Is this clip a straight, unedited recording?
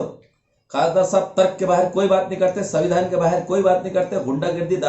yes; 0 cuts

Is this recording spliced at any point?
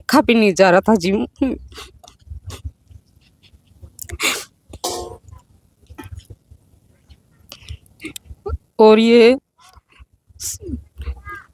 no; 0 cuts

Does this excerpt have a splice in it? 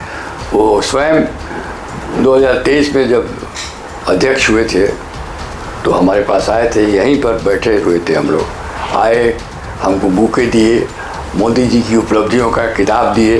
no; 0 cuts

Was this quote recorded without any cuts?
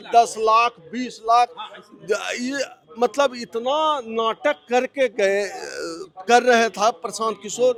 yes; 0 cuts

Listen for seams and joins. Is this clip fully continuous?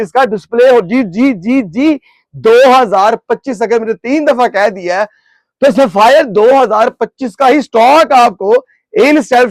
yes; 0 cuts

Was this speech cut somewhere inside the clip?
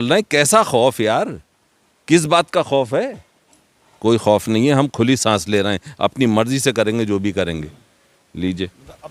no; 0 cuts

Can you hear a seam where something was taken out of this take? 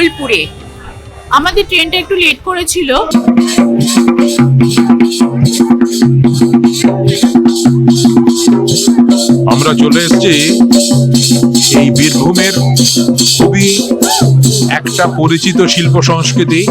yes; 1 cut; at 3.1 s

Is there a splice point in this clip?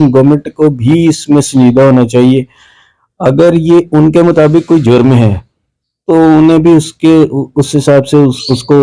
no; 0 cuts

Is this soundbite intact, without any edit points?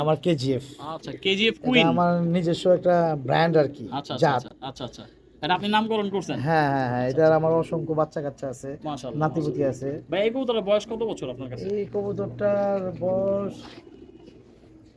yes; 0 cuts

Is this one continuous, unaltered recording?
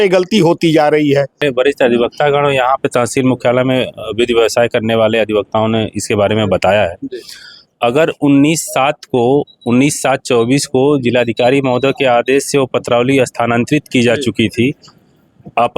no; 1 cut; at 1.4 s

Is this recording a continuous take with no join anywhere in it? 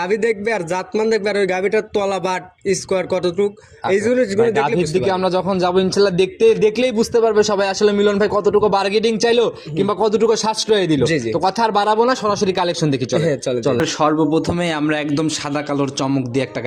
yes; 0 cuts

